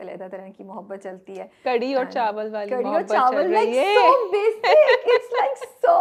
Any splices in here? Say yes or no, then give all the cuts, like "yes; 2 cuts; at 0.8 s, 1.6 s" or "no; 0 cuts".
no; 0 cuts